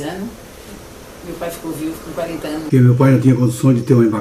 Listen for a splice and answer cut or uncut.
cut